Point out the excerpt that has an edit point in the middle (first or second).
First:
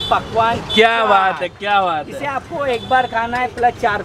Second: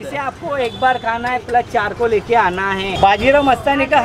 second